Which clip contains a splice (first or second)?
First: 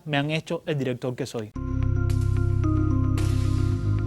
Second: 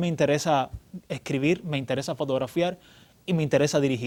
first